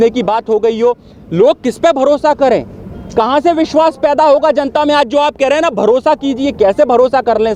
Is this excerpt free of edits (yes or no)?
yes